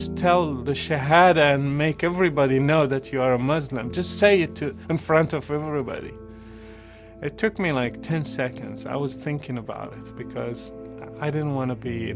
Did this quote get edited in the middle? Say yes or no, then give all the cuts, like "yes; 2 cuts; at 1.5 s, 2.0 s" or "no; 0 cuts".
no; 0 cuts